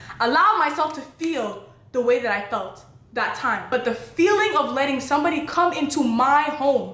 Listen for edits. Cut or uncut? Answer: cut